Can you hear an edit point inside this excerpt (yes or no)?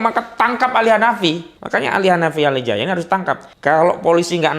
yes